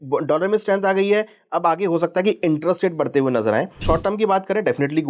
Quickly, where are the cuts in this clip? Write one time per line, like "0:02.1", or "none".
0:03.8